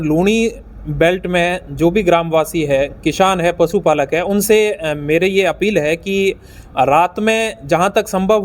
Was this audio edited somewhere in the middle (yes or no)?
no